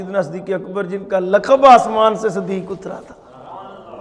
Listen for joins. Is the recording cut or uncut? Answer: uncut